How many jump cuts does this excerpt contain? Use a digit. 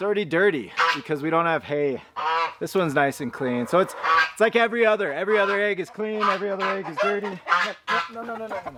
0